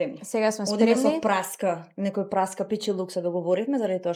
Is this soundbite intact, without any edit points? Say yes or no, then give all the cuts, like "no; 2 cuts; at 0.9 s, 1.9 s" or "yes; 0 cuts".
yes; 0 cuts